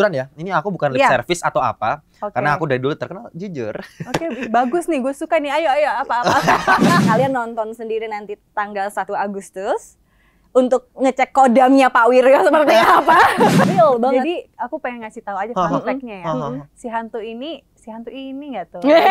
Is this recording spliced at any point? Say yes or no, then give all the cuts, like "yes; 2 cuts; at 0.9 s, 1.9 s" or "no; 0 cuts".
yes; 2 cuts; at 7.0 s, 13.6 s